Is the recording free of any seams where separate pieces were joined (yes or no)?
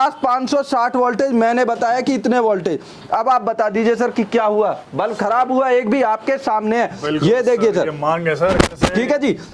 yes